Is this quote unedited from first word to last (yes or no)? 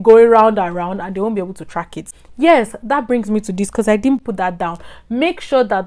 yes